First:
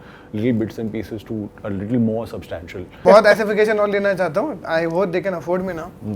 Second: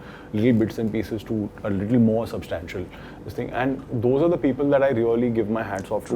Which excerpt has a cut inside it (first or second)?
first